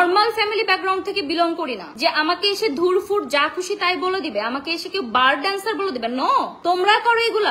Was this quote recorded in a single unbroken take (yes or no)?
no